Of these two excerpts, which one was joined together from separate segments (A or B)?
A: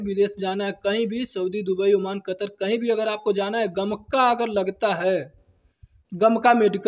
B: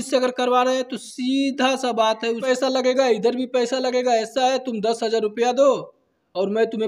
B